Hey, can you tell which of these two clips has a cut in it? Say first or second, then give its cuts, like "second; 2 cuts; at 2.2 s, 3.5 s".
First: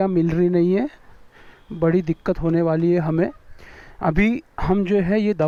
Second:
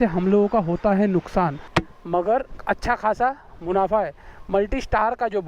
second; 1 cut; at 1.6 s